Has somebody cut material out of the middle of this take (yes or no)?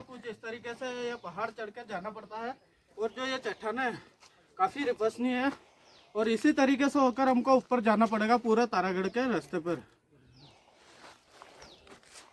no